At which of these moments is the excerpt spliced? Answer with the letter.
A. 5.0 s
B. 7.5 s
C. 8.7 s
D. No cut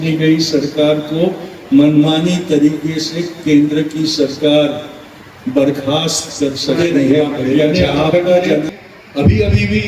C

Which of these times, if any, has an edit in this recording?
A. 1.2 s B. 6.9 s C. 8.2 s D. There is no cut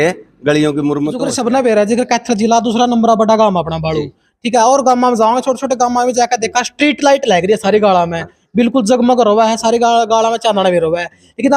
A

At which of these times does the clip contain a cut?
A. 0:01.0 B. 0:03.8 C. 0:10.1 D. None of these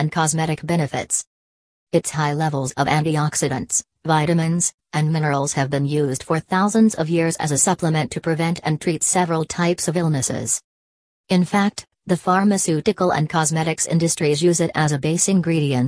C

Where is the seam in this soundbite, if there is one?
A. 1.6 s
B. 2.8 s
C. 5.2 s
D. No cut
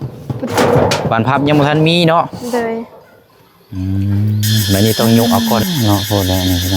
C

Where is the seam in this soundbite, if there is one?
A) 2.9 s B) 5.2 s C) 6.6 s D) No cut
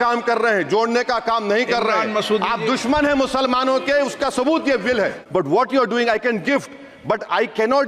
B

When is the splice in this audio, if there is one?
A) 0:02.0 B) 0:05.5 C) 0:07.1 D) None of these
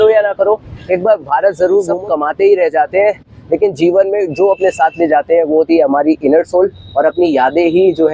A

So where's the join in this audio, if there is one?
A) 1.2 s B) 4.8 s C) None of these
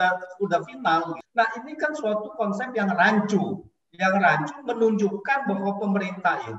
A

